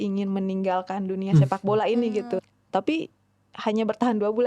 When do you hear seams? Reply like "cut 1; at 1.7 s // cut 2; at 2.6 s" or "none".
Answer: cut 1; at 2.4 s